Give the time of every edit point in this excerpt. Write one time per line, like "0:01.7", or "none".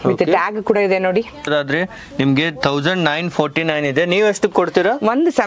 0:01.5